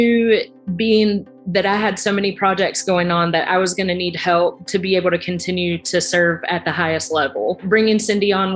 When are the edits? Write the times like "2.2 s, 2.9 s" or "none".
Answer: 7.6 s